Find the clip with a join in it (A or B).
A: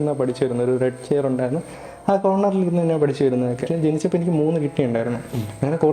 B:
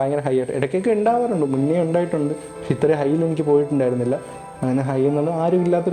A